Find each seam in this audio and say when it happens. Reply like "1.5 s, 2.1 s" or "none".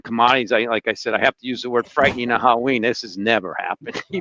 none